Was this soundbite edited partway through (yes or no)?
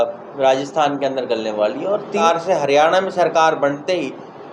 yes